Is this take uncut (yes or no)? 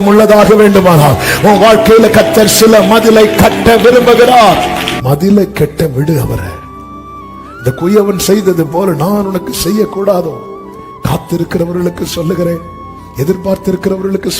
no